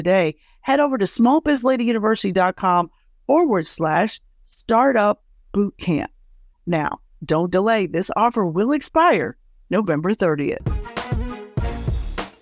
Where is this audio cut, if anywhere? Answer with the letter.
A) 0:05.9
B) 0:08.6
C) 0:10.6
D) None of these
C